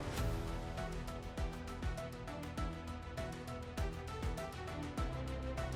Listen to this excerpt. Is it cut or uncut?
uncut